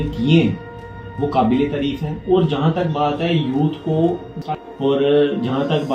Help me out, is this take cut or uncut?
cut